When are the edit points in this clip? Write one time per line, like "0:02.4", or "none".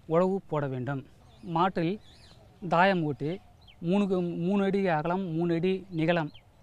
0:04.6